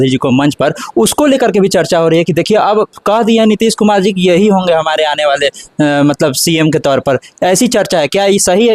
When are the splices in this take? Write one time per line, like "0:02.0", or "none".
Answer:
none